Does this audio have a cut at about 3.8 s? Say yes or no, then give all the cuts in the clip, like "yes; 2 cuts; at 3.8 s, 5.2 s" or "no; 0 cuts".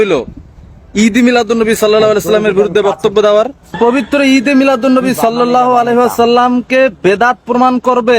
yes; 1 cut; at 3.8 s